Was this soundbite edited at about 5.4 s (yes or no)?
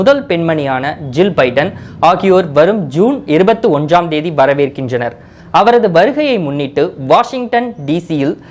no